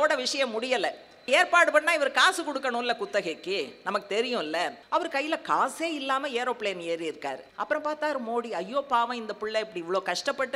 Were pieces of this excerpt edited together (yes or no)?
yes